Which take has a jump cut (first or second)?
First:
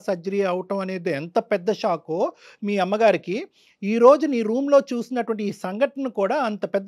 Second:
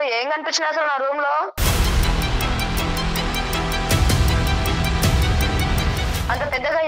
second